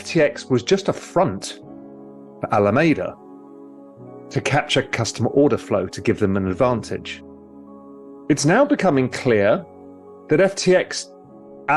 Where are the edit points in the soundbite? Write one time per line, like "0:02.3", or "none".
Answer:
none